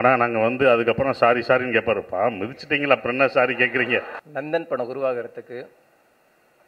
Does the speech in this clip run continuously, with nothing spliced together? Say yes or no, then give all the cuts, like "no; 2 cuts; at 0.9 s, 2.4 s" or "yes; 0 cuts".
no; 1 cut; at 4.2 s